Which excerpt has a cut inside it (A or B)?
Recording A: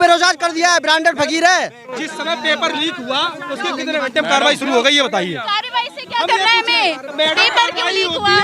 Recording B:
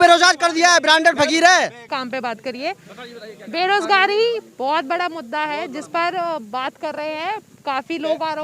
A